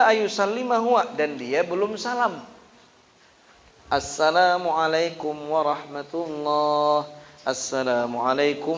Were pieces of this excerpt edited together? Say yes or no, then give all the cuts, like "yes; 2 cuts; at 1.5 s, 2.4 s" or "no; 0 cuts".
no; 0 cuts